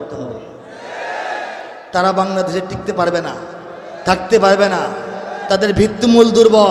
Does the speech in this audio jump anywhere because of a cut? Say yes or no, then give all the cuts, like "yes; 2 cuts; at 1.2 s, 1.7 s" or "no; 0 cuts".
yes; 1 cut; at 1.7 s